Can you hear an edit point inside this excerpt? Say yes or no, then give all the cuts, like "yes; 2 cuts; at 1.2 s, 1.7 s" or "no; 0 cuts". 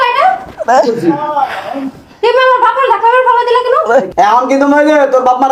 yes; 1 cut; at 4.1 s